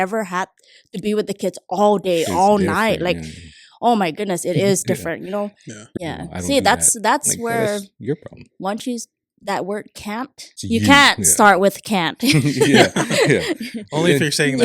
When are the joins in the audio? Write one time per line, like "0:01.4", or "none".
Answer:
0:05.8
0:10.5